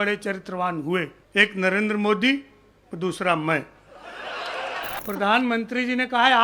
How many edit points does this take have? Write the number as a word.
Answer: two